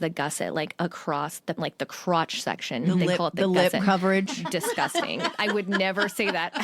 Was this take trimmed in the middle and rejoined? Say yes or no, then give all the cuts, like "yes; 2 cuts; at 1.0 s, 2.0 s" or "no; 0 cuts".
yes; 1 cut; at 1.6 s